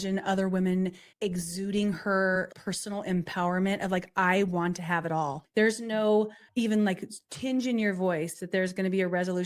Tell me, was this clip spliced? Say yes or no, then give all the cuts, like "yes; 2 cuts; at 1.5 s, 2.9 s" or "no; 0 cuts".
yes; 4 cuts; at 1.0 s, 2.5 s, 5.4 s, 6.4 s